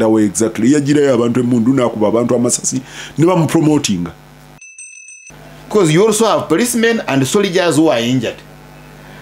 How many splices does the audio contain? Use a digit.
1